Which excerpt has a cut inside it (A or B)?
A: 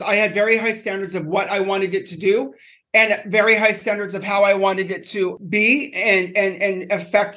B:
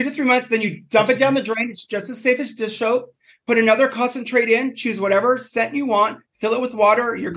A